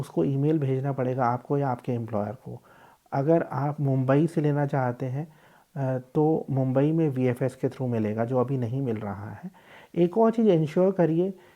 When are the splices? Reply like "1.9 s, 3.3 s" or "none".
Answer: none